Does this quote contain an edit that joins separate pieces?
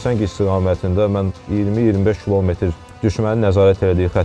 yes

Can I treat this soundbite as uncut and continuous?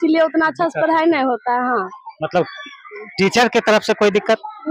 yes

